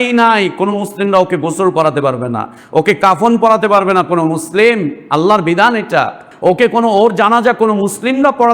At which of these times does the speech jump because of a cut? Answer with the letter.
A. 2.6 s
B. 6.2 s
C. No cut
B